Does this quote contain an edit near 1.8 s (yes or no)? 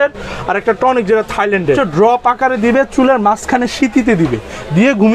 yes